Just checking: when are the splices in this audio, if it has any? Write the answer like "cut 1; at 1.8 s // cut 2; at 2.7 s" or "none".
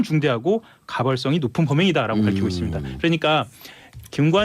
cut 1; at 2.1 s